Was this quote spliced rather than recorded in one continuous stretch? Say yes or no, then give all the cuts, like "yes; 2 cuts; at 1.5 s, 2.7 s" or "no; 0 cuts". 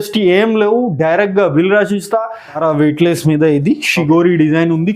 yes; 1 cut; at 2.6 s